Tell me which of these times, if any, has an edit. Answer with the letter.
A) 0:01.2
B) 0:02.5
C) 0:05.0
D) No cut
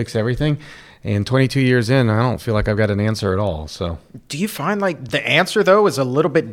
C